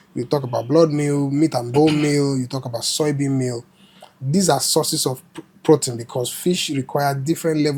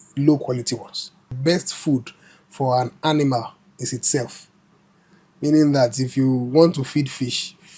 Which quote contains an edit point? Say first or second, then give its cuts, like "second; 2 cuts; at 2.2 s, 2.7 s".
second; 1 cut; at 1.3 s